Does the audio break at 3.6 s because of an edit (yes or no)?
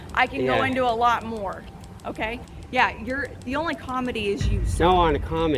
no